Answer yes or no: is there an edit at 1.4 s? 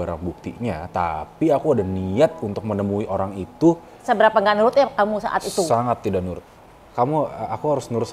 no